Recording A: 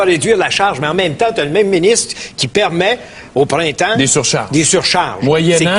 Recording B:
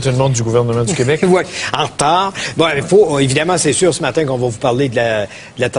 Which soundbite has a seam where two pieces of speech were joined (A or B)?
A